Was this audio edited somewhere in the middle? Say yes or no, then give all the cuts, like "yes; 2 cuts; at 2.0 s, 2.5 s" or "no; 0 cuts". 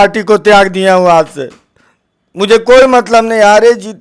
no; 0 cuts